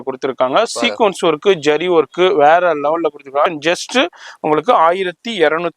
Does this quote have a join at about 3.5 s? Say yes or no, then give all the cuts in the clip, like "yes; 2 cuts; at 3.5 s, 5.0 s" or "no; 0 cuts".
yes; 1 cut; at 3.5 s